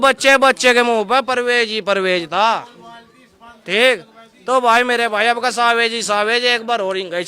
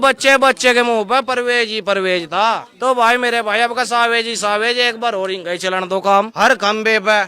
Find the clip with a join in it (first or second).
second